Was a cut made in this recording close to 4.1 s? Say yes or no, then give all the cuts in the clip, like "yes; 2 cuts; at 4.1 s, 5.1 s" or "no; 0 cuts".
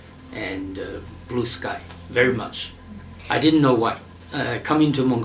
yes; 1 cut; at 4.1 s